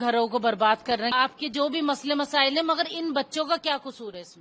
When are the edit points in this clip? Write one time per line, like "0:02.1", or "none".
0:01.1